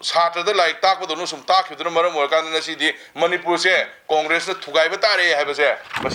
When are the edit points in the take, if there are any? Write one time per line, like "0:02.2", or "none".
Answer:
none

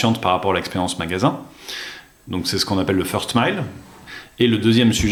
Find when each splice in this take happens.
none

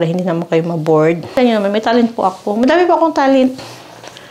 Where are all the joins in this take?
0:01.4

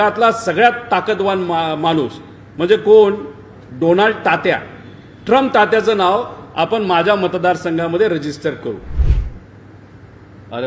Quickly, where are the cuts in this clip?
0:09.1

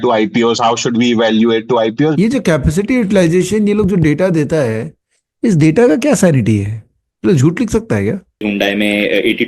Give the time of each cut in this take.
0:02.1
0:08.4

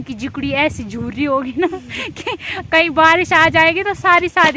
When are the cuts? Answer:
none

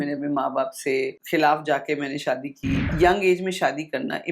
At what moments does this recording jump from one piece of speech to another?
0:01.2
0:02.9

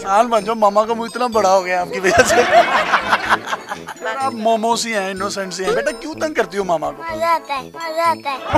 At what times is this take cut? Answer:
0:03.9

